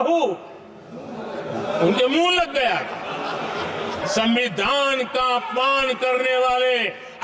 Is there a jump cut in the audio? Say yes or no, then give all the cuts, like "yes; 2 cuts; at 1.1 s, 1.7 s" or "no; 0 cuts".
yes; 1 cut; at 4.0 s